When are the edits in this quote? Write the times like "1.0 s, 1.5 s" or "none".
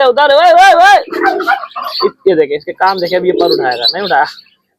none